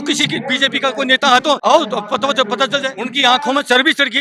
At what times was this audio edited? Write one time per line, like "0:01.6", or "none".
0:01.6
0:03.0